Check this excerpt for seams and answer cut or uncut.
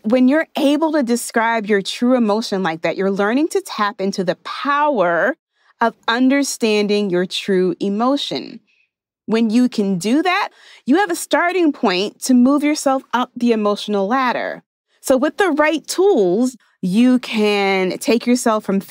cut